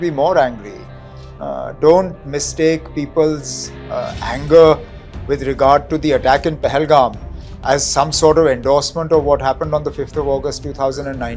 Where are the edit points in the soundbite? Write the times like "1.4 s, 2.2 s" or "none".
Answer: none

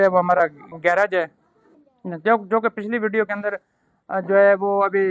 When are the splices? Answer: none

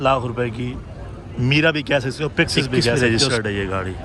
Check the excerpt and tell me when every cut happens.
2.9 s

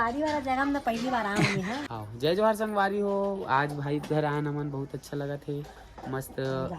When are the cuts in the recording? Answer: 1.9 s

